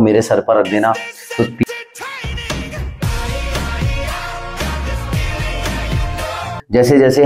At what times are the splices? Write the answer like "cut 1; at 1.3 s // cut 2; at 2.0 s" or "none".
cut 1; at 1.7 s // cut 2; at 6.4 s